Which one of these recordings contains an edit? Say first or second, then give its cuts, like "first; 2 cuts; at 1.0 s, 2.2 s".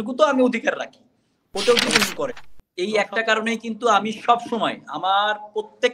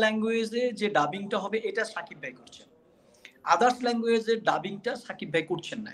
first; 1 cut; at 2.4 s